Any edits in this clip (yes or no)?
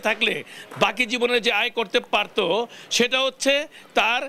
no